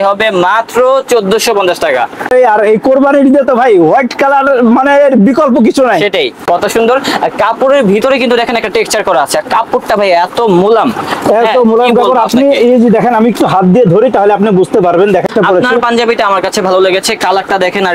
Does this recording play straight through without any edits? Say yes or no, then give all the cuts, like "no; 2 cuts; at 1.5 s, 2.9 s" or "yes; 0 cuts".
no; 3 cuts; at 2.3 s, 6.4 s, 15.3 s